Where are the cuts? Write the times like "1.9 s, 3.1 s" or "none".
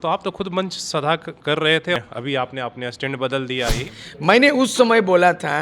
2.0 s, 3.8 s